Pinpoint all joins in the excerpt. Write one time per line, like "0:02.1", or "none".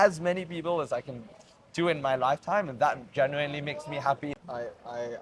0:04.3